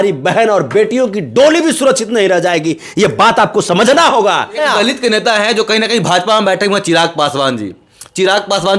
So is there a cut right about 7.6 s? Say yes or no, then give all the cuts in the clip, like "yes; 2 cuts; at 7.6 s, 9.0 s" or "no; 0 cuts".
no; 1 cut; at 4.6 s